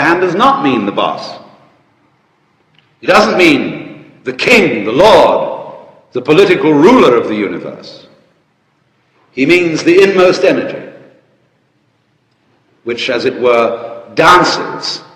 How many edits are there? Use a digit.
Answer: 0